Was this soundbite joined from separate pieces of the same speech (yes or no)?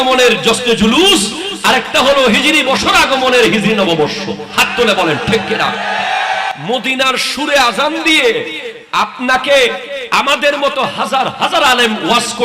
yes